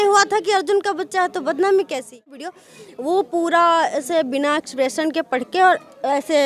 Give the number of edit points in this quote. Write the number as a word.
one